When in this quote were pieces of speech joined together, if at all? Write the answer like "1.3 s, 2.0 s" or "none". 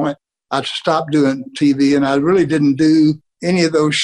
none